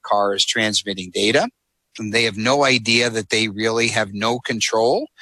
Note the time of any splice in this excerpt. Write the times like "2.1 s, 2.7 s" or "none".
2.0 s